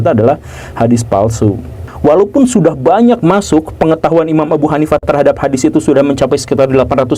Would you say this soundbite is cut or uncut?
cut